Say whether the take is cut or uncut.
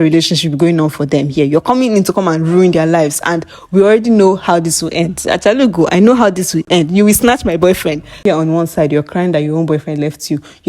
cut